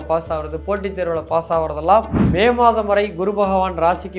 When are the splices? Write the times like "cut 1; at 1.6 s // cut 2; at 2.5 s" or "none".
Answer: cut 1; at 2.2 s